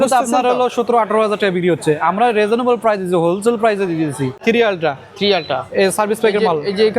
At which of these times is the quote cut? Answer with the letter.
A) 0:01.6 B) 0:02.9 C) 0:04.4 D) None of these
C